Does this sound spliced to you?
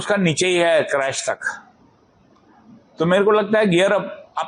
no; 0 cuts

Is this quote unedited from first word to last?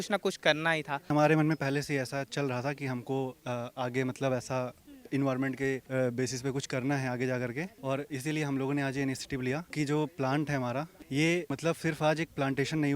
no; 4 cuts; at 1.1 s, 9.7 s, 11.0 s, 11.5 s

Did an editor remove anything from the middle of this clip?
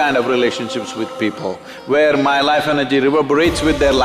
no; 0 cuts

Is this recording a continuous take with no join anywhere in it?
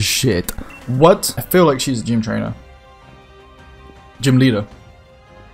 no; 1 cut; at 1.3 s

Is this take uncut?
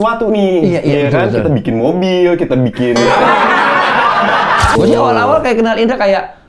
no; 1 cut; at 4.8 s

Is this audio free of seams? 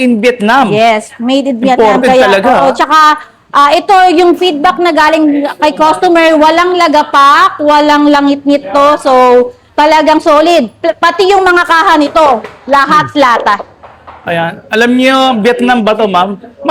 yes; 0 cuts

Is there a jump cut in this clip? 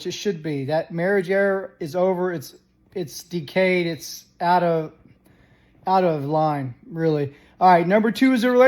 no; 0 cuts

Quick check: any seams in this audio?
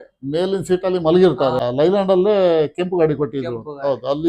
yes; 1 cut; at 1.6 s

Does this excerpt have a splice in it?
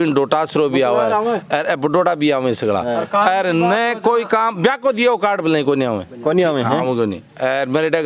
no; 0 cuts

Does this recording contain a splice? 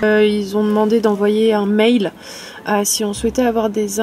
no; 0 cuts

